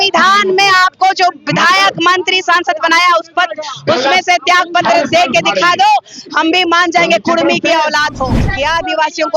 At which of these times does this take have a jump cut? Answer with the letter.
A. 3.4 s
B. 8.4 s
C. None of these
B